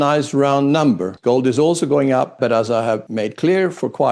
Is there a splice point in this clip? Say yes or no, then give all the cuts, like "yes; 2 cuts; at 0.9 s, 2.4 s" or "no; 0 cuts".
yes; 1 cut; at 1.1 s